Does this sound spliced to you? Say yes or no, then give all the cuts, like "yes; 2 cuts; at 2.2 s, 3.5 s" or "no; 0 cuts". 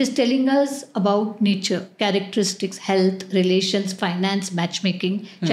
no; 0 cuts